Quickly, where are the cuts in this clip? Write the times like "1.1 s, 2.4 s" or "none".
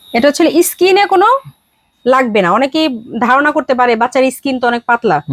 none